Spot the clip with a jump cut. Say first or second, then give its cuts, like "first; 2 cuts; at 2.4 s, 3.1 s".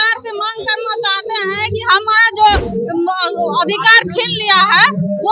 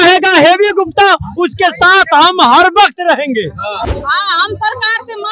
second; 1 cut; at 3.9 s